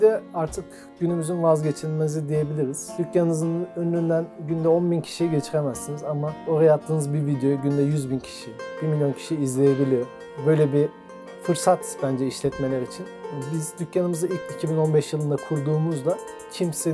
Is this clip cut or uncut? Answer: uncut